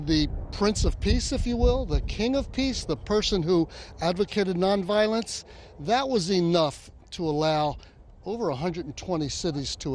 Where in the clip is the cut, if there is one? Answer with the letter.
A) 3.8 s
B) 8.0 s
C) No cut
B